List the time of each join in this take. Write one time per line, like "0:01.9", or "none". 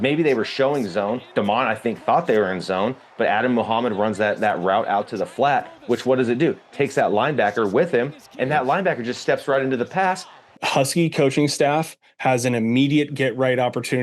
0:10.6